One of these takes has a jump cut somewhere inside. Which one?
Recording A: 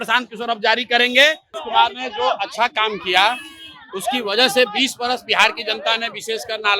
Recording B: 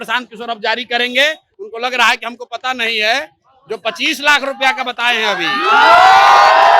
A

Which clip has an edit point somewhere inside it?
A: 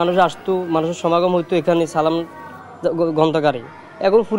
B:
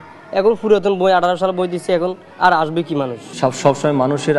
B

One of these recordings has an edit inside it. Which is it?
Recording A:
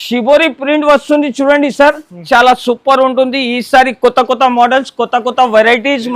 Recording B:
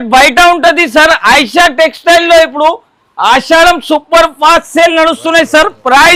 A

